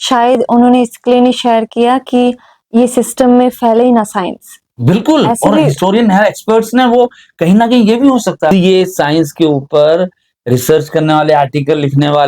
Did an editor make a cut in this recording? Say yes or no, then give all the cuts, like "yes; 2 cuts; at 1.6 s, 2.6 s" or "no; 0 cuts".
yes; 1 cut; at 8.5 s